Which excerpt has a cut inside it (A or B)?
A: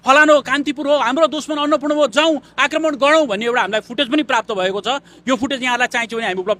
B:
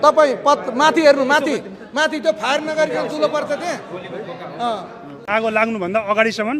B